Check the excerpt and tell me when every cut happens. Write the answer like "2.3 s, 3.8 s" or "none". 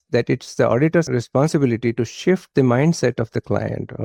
none